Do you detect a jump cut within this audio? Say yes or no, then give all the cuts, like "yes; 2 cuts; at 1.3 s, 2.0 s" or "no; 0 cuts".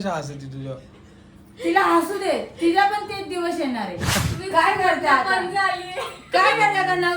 yes; 1 cut; at 4.2 s